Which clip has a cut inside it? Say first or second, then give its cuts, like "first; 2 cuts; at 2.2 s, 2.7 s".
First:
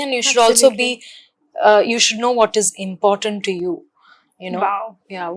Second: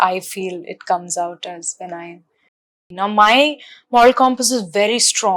second; 1 cut; at 2.5 s